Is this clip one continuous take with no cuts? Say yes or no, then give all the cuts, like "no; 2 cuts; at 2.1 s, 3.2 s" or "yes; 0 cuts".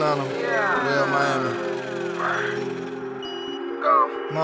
yes; 0 cuts